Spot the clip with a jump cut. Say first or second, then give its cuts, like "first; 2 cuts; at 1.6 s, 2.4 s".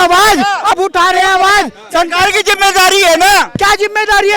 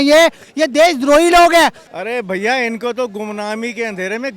second; 1 cut; at 1.9 s